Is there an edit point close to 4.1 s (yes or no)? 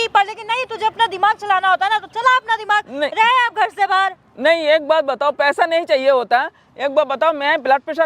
no